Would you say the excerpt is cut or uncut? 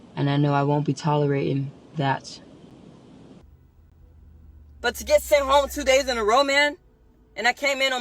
cut